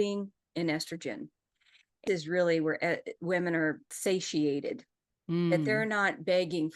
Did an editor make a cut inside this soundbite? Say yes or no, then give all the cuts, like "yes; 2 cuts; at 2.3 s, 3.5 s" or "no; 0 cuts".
yes; 1 cut; at 2.0 s